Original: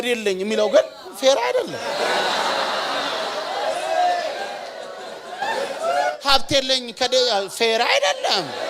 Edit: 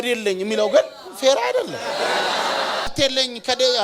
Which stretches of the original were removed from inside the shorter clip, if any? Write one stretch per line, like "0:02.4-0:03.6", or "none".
0:02.9-0:06.4